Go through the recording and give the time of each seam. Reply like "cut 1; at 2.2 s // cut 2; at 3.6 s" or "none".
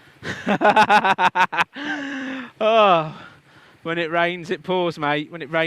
none